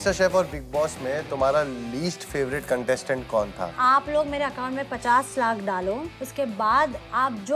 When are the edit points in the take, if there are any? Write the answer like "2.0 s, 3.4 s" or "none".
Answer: 3.7 s, 6.2 s